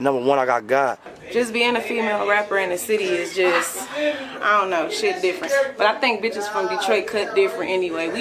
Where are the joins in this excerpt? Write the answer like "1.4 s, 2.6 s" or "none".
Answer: 1.1 s